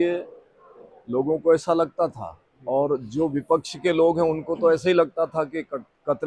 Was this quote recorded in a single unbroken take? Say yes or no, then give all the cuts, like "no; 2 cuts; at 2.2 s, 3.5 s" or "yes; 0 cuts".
yes; 0 cuts